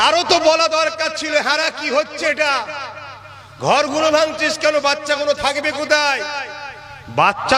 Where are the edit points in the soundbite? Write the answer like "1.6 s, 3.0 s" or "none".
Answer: none

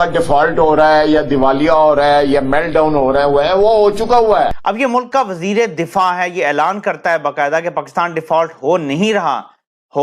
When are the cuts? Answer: 4.6 s

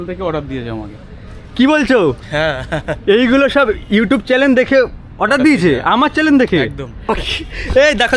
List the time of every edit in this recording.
7.1 s

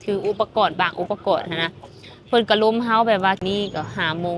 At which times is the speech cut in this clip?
3.4 s

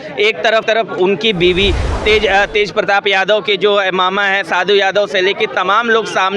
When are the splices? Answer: 1.9 s

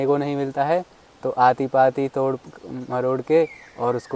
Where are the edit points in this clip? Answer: none

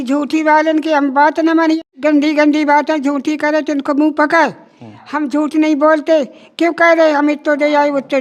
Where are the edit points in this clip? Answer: 1.8 s

